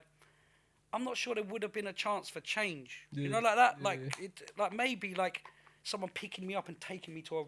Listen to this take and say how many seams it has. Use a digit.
0